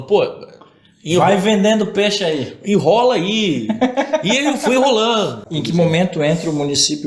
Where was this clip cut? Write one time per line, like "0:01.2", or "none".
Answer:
0:05.4

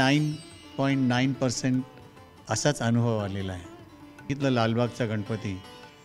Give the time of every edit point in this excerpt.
0:04.3

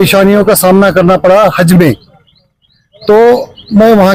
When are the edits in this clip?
none

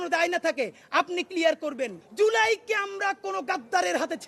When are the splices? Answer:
0:02.0

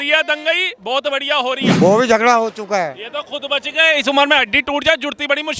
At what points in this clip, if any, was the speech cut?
0:01.8

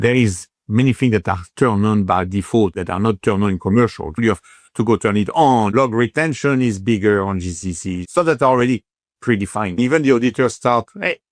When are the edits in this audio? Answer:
0:02.8
0:04.2
0:05.7
0:07.9
0:09.8

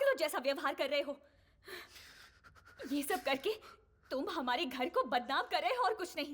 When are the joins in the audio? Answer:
none

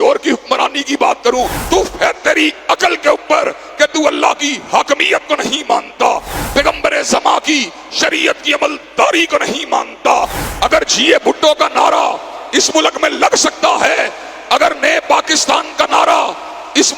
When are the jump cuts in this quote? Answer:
0:01.6
0:06.3
0:10.4

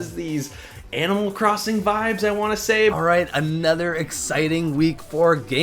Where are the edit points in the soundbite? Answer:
0:03.0

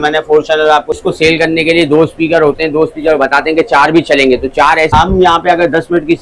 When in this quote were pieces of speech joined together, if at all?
0:01.0
0:04.9

